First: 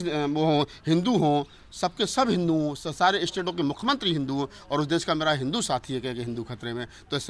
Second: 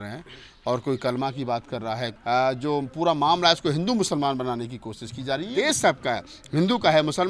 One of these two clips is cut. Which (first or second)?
second